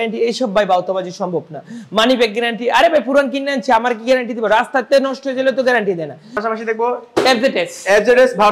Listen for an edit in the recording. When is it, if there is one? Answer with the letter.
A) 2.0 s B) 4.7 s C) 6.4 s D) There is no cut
C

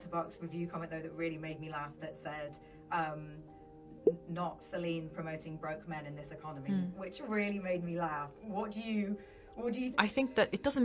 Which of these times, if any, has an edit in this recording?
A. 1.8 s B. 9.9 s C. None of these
B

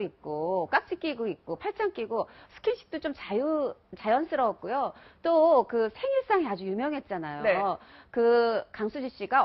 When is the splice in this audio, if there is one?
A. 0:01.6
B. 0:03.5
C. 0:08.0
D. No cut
D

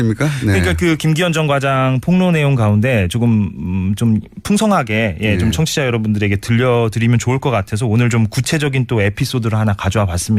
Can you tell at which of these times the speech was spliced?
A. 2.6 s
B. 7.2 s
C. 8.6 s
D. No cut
C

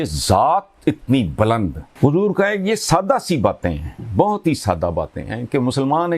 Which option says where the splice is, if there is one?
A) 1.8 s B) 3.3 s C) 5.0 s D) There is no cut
A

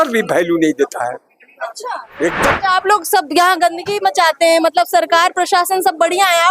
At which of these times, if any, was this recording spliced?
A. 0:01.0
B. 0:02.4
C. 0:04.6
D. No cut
B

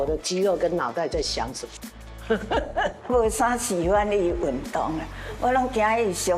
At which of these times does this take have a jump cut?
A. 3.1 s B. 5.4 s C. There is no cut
A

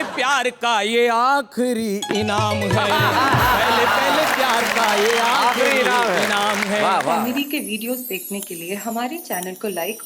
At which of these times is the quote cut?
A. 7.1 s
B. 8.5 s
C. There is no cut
A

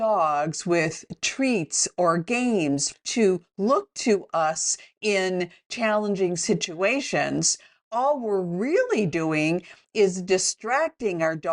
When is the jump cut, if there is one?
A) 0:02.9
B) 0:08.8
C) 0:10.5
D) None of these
A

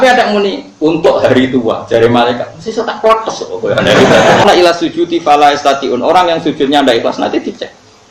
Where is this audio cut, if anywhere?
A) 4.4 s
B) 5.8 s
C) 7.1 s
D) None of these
A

